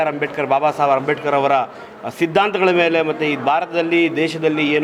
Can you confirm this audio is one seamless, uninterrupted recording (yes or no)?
yes